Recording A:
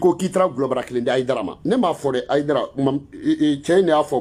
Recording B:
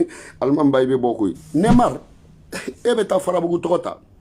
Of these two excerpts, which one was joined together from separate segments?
B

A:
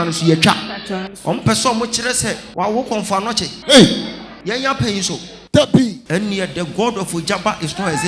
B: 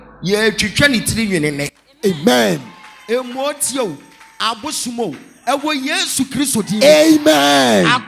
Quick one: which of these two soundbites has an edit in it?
A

